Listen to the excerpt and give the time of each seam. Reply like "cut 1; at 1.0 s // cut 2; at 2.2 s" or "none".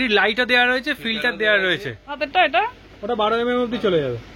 cut 1; at 2.4 s